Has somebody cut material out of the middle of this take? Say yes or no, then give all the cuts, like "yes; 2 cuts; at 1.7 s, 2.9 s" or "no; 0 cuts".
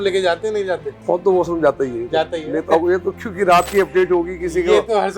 yes; 1 cut; at 0.9 s